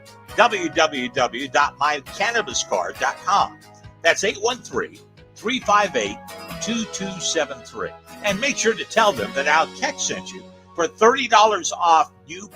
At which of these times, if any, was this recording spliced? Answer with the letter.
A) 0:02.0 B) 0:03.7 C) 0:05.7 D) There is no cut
B